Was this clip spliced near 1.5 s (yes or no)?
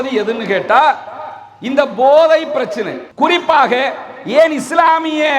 no